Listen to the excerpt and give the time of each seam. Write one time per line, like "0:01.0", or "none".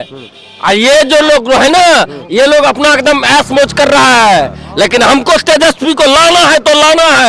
none